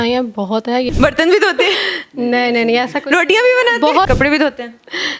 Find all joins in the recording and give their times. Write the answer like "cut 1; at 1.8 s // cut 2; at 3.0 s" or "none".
cut 1; at 0.9 s // cut 2; at 4.1 s